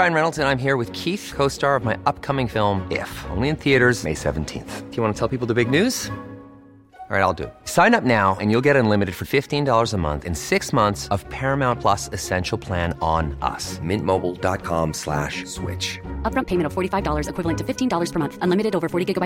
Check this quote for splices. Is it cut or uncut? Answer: uncut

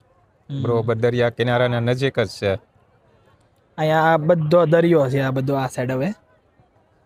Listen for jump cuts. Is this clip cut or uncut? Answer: uncut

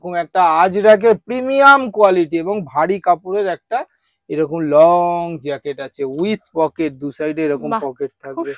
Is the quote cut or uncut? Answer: uncut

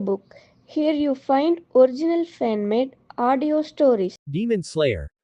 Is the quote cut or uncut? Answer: cut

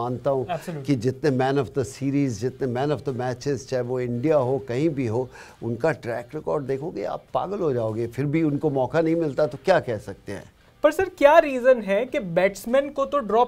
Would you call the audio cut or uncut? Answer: uncut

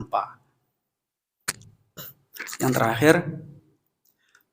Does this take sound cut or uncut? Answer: cut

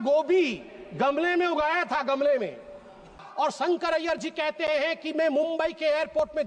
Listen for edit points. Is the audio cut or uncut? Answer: cut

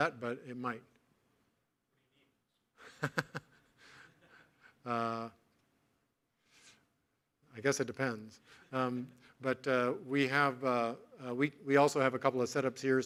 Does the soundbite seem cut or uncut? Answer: uncut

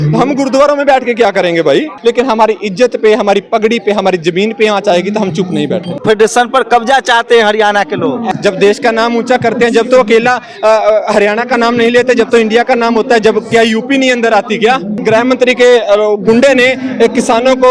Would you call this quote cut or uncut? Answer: cut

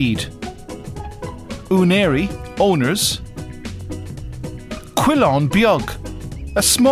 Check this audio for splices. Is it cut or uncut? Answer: uncut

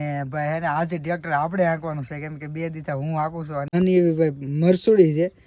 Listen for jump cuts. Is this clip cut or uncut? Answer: cut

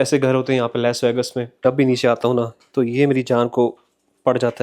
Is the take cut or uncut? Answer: cut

